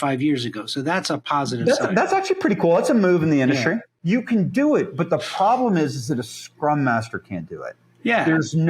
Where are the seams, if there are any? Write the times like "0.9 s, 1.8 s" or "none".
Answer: 3.9 s